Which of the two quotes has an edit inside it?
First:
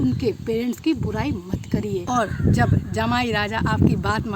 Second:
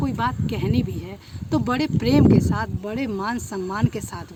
first; 1 cut; at 2.0 s

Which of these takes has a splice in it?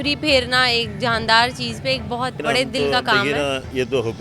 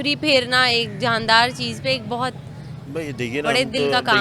first; 1 cut; at 2.4 s

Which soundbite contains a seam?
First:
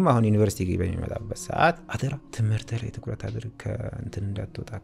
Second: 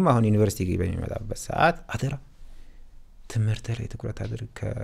first; 1 cut; at 2.3 s

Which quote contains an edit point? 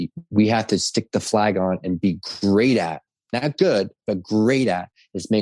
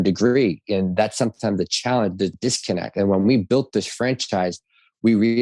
second; 1 cut; at 2.4 s

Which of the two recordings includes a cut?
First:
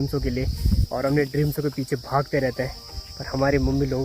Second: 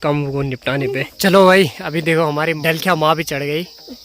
second; 2 cuts; at 1.1 s, 2.6 s

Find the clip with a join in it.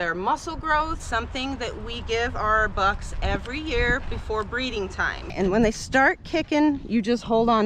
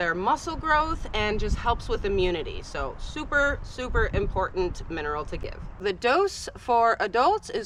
first; 2 cuts; at 1.0 s, 5.3 s

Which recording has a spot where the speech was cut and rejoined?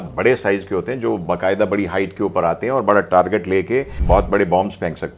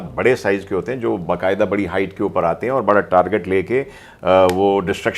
first; 1 cut; at 3.9 s

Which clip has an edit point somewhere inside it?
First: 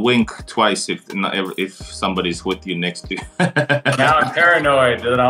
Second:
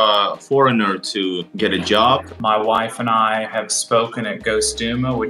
second; 2 cuts; at 1.5 s, 2.3 s

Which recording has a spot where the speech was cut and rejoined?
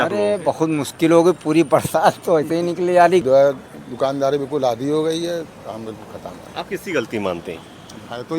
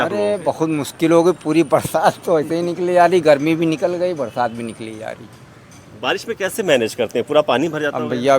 first; 1 cut; at 3.2 s

